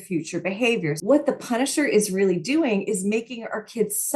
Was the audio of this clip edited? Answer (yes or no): yes